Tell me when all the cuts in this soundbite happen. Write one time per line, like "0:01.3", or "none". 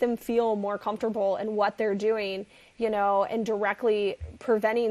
none